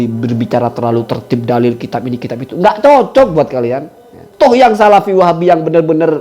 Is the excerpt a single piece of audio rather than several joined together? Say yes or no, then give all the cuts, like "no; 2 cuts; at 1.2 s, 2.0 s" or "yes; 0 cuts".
no; 1 cut; at 4.5 s